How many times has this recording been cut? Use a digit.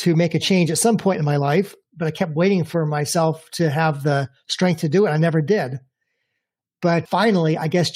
2